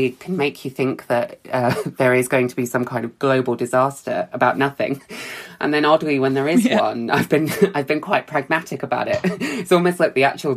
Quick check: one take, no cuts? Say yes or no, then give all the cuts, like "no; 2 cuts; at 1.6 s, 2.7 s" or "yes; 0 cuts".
yes; 0 cuts